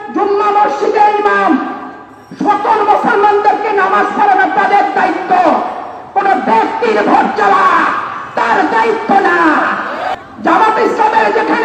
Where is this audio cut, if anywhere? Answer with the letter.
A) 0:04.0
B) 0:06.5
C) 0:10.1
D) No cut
C